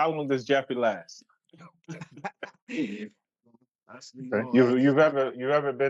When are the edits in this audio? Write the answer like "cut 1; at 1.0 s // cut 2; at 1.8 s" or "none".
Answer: cut 1; at 3.2 s